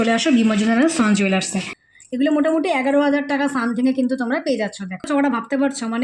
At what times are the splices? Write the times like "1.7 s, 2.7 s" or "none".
1.8 s, 5.1 s